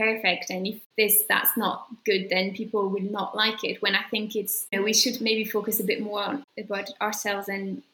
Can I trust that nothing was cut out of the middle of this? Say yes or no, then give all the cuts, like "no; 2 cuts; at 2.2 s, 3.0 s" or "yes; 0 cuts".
yes; 0 cuts